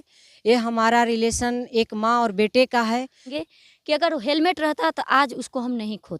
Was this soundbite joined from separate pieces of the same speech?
yes; 1 cut; at 3.3 s

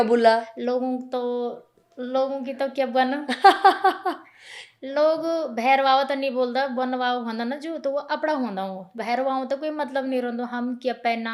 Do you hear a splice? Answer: yes; 1 cut; at 9.0 s

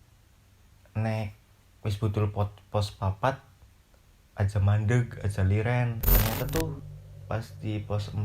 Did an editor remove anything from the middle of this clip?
yes; 1 cut; at 6.0 s

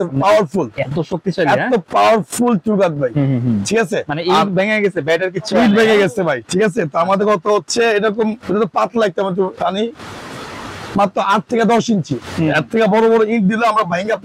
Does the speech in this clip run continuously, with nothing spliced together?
yes; 0 cuts

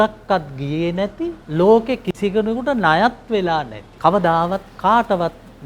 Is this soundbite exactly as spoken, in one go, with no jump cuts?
no; 2 cuts; at 1.4 s, 3.8 s

